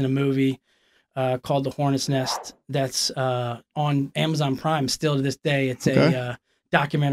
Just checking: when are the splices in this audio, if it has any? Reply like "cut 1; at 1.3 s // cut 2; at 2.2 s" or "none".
none